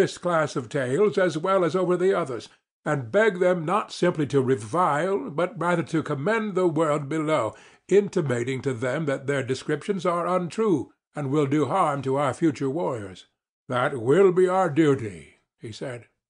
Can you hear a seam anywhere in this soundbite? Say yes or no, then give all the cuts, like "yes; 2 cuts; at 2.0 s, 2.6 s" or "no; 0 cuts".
no; 0 cuts